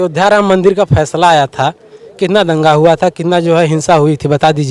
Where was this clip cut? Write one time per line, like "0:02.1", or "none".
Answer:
none